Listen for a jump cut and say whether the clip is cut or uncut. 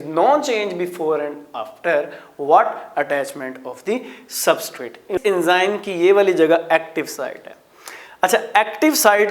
cut